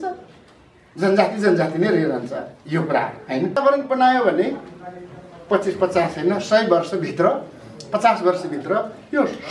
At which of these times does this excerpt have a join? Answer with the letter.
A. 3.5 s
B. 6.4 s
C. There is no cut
A